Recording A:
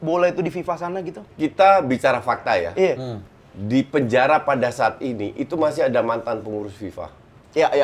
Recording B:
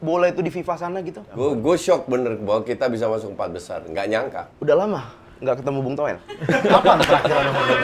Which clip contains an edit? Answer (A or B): B